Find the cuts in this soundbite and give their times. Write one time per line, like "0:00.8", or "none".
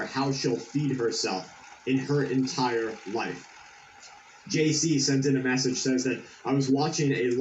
none